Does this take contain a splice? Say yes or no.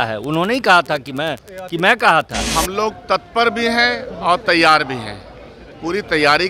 yes